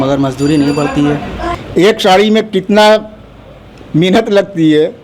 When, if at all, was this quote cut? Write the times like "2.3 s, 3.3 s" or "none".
1.4 s